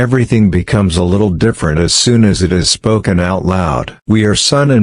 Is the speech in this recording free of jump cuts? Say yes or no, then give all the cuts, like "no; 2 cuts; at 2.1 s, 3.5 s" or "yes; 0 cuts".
no; 1 cut; at 3.9 s